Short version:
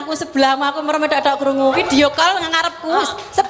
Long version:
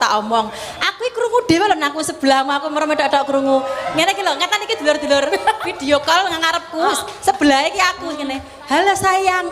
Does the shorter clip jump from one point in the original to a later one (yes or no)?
yes